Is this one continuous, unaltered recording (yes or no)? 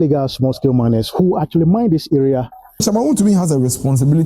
no